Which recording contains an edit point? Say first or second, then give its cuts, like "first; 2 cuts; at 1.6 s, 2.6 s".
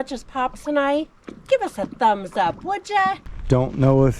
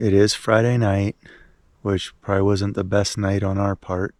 first; 1 cut; at 3.3 s